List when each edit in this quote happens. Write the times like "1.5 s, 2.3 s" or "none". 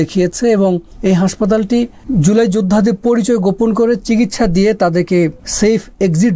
0.9 s, 2.0 s, 5.4 s